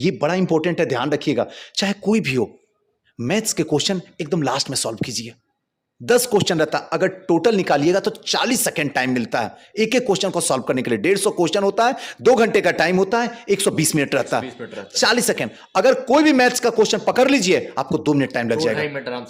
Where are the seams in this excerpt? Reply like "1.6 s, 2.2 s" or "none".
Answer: none